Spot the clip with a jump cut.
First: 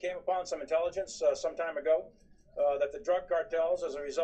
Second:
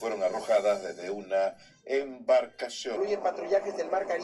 second; 1 cut; at 2.9 s

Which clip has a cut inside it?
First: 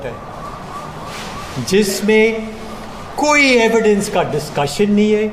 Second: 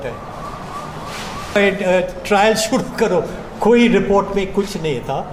second; 1 cut; at 1.6 s

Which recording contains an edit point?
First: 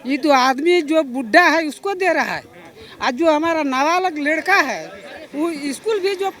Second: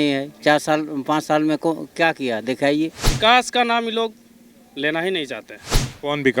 second; 1 cut; at 3.0 s

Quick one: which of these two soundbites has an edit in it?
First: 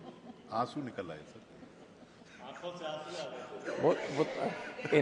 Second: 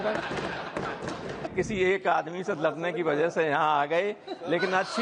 second; 1 cut; at 1.5 s

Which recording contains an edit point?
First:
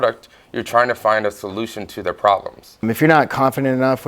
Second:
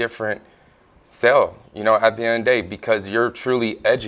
first; 1 cut; at 2.8 s

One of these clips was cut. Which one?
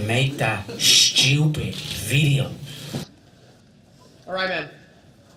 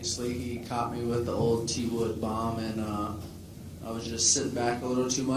second; 1 cut; at 2.4 s

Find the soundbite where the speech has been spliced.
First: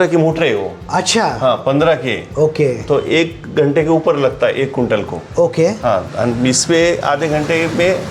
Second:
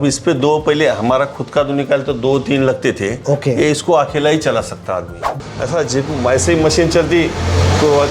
second; 1 cut; at 5.2 s

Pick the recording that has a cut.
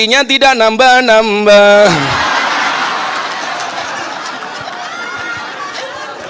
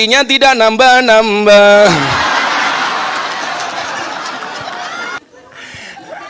second; 1 cut; at 5.2 s

